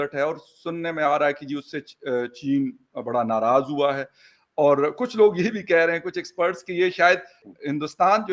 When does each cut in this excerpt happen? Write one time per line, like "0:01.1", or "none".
0:07.4